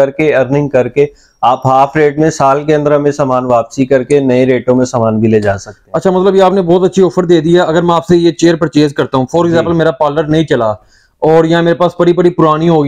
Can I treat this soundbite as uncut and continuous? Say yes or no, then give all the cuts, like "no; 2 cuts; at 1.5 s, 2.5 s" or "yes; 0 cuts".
yes; 0 cuts